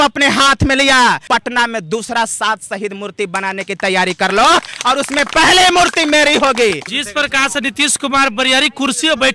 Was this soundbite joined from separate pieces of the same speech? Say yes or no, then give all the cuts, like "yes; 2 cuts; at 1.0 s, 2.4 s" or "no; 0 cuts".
yes; 2 cuts; at 1.2 s, 6.9 s